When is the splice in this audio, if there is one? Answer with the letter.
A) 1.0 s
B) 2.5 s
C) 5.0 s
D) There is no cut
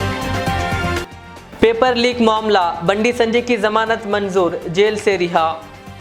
A